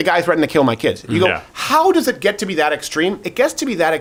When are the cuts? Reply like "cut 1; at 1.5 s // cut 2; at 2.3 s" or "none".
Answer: none